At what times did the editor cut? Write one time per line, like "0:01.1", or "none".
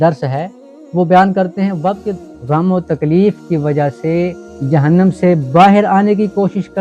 0:02.1